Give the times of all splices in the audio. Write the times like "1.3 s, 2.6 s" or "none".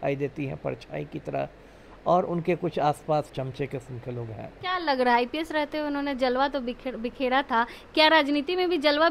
3.3 s, 4.6 s